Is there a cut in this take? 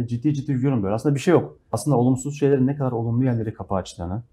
yes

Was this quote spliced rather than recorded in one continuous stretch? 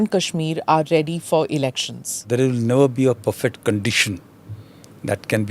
yes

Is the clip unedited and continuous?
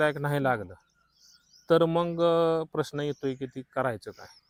yes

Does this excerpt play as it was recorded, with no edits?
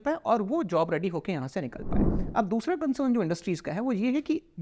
no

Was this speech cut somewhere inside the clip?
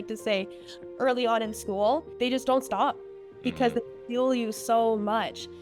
yes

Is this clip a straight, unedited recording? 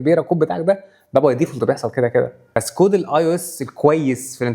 no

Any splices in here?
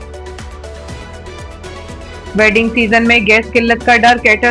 no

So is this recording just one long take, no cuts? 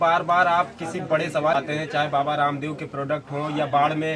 no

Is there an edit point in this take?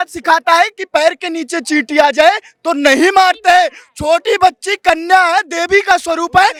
no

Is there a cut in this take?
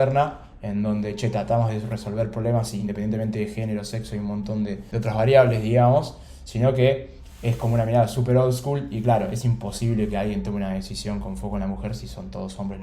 yes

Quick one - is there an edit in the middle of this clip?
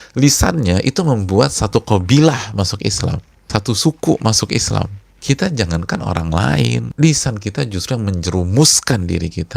yes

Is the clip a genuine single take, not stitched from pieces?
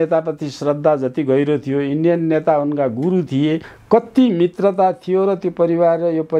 no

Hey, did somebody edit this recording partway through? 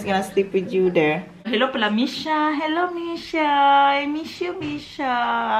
yes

